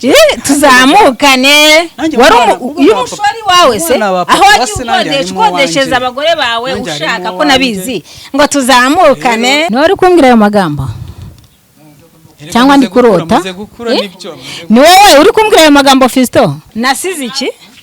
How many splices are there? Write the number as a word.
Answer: two